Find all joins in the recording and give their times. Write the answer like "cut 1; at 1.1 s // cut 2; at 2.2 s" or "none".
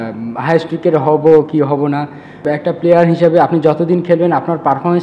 cut 1; at 2.4 s